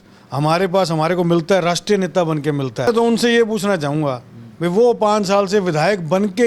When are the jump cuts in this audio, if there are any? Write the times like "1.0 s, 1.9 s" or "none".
2.9 s

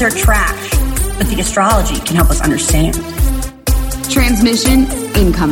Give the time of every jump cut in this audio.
none

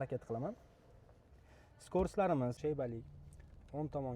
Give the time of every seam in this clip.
2.6 s

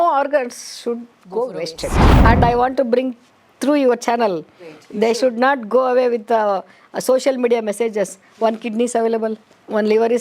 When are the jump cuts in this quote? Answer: 2.2 s

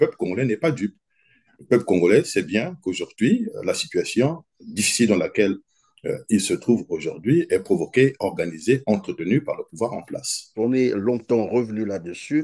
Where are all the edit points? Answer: 10.4 s

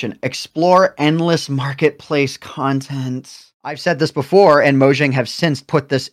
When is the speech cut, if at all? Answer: 3.7 s

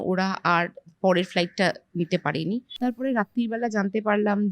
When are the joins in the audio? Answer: 2.7 s

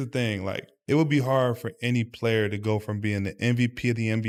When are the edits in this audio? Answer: none

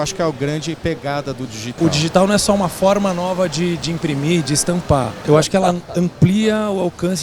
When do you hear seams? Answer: 1.7 s, 5.1 s

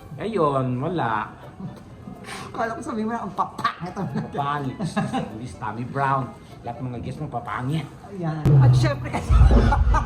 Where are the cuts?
8.0 s

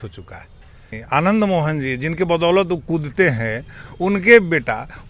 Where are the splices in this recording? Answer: 0.9 s

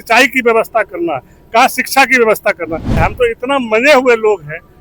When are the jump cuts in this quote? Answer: 3.0 s

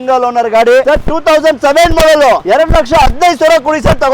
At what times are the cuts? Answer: 0.8 s, 2.4 s

